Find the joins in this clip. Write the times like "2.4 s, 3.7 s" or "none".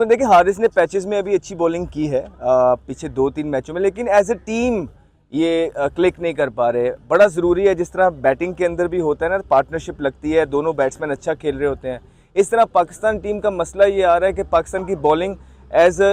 none